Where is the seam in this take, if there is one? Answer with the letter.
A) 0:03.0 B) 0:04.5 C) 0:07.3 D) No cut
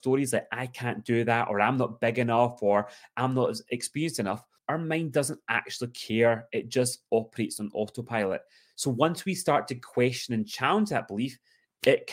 B